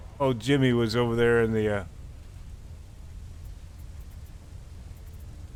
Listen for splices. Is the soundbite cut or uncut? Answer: uncut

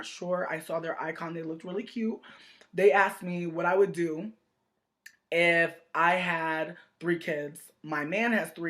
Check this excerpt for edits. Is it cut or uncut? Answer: cut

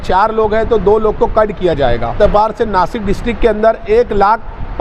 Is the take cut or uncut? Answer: cut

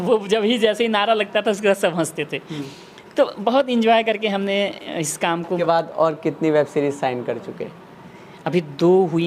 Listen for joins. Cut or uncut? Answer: cut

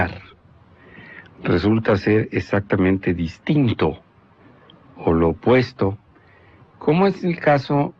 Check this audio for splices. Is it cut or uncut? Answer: cut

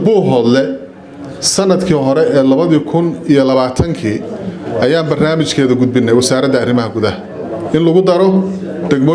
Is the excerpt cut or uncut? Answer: uncut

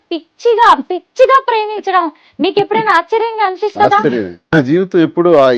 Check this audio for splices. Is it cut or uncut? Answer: cut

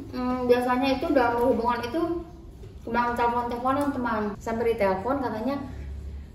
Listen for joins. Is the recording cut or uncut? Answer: cut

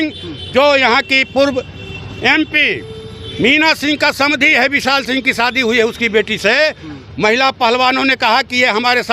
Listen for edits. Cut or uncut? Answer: uncut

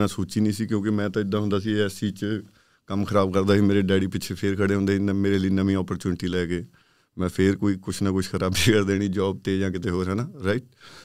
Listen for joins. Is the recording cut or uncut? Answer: uncut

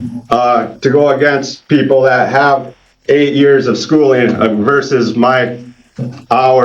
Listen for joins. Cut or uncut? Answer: uncut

